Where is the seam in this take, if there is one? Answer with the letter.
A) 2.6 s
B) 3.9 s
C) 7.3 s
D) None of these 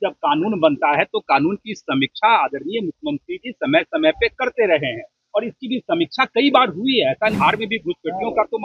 C